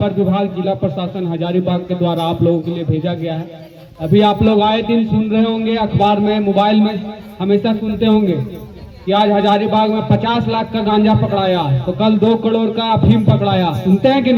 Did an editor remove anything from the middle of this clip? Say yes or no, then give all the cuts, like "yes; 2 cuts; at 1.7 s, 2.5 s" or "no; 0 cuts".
no; 0 cuts